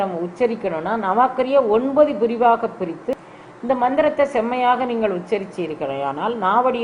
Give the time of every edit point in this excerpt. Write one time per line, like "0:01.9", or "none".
0:03.3